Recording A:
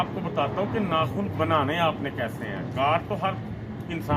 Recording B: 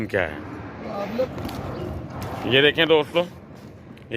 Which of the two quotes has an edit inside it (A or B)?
B